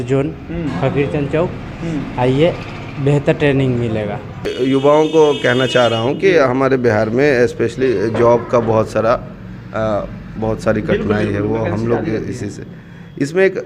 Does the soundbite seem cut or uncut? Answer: cut